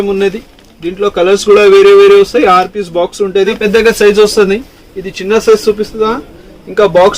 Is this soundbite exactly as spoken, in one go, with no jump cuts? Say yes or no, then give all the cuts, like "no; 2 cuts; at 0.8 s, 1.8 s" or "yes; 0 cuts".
no; 1 cut; at 3.6 s